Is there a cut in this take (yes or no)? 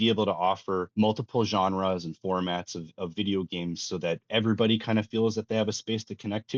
no